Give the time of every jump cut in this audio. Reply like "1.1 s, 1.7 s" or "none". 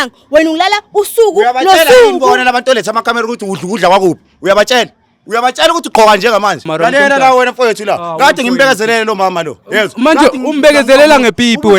6.7 s